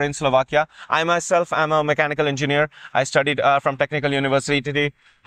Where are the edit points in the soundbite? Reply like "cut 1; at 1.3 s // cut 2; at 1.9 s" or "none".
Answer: none